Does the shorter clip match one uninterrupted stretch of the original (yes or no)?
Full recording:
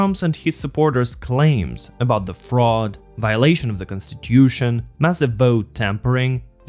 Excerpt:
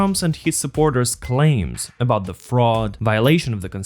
no